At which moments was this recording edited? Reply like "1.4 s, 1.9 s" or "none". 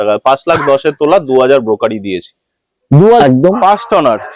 3.2 s